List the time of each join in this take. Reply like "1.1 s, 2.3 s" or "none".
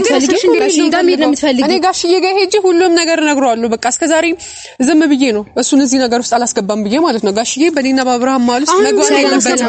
none